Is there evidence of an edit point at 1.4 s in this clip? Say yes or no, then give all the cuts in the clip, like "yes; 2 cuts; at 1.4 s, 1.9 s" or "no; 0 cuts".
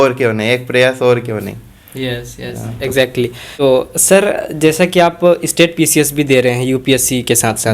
no; 0 cuts